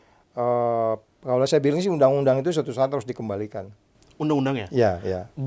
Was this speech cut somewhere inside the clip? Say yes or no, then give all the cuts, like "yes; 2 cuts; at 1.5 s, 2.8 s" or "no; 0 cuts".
no; 0 cuts